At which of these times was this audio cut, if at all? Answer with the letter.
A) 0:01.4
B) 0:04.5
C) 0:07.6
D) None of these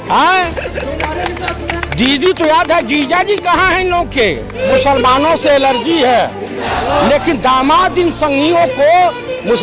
B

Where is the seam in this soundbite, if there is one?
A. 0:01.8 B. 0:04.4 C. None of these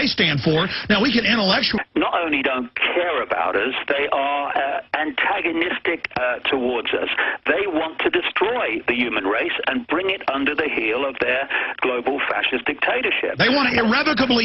C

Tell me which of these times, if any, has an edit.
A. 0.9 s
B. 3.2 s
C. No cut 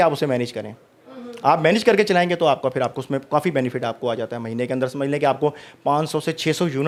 C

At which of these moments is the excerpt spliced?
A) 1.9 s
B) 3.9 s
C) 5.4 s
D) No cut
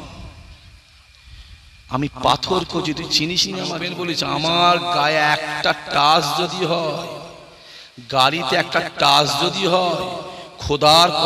B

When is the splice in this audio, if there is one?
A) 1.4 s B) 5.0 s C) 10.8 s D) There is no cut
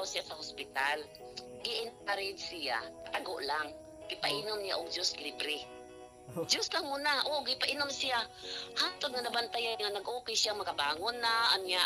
D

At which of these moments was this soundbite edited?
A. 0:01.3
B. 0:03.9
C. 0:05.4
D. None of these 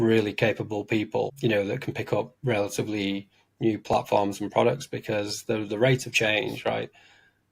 A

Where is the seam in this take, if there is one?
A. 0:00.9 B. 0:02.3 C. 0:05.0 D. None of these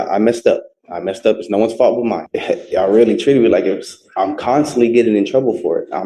B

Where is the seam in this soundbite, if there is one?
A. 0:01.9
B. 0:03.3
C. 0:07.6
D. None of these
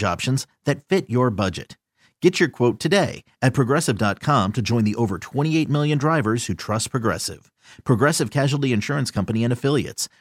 D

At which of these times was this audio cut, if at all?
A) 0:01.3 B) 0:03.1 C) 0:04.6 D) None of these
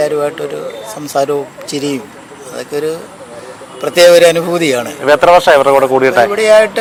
D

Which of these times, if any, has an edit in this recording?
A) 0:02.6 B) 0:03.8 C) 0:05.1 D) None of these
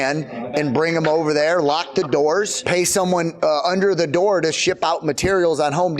A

